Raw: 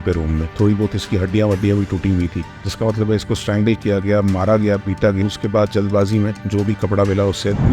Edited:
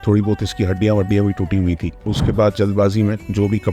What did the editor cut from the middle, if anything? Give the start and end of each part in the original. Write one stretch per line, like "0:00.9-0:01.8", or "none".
0:02.7-0:05.3